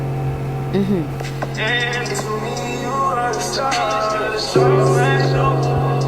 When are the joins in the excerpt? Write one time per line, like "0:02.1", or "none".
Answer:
none